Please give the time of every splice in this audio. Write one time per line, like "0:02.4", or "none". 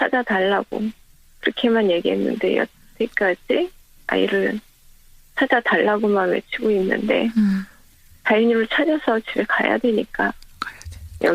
none